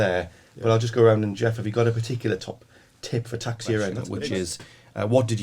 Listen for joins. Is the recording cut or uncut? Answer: cut